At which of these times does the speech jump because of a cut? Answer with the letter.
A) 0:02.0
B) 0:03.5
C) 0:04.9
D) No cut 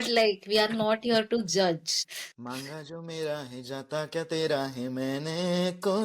A